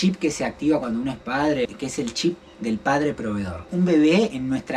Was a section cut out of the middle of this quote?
yes; 2 cuts; at 1.7 s, 3.7 s

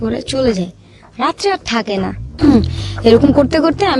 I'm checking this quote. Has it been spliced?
yes; 1 cut; at 2.2 s

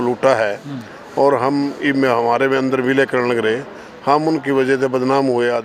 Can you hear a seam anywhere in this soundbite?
no; 0 cuts

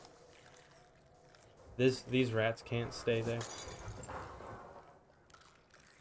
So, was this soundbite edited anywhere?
no; 0 cuts

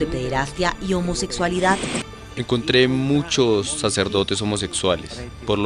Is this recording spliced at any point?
yes; 1 cut; at 2.0 s

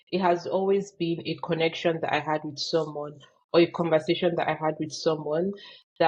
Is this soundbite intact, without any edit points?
yes; 0 cuts

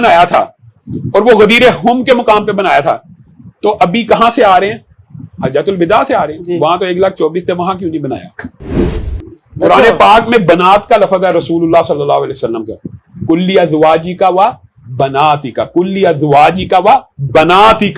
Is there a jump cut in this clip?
yes; 1 cut; at 8.9 s

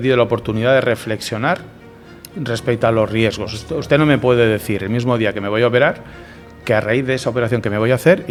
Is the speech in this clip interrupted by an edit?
no; 0 cuts

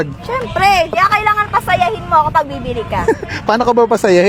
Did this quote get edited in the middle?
no; 0 cuts

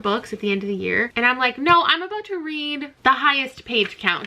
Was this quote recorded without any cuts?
no; 2 cuts; at 1.1 s, 2.9 s

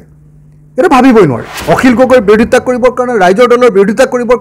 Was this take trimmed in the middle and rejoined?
yes; 1 cut; at 1.5 s

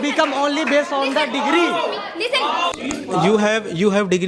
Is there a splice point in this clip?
yes; 1 cut; at 2.7 s

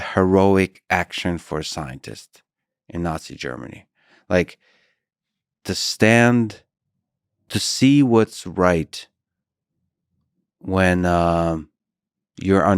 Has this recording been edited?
no; 0 cuts

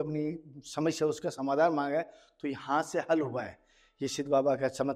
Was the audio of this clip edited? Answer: no; 0 cuts

